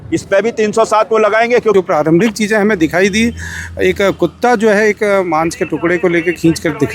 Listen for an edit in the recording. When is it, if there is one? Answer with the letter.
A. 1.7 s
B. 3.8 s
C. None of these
A